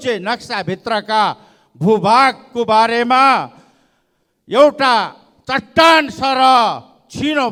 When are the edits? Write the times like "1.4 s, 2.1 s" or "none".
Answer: none